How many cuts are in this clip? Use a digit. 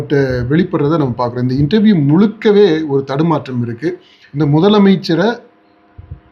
1